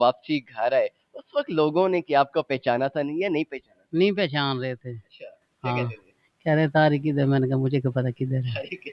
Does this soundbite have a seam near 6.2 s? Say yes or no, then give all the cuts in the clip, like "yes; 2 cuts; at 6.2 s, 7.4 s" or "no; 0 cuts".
no; 0 cuts